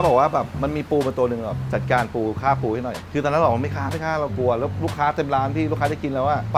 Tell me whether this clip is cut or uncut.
uncut